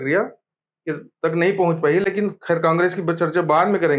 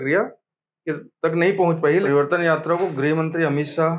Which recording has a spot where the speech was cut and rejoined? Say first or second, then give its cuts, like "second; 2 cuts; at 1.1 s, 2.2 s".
second; 1 cut; at 2.0 s